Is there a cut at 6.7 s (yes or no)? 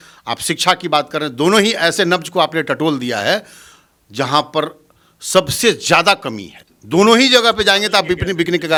no